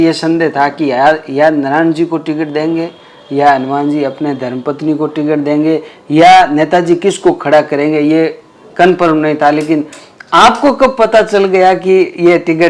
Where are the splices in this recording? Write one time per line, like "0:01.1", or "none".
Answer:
none